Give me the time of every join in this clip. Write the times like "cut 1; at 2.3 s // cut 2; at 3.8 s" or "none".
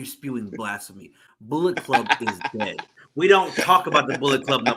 none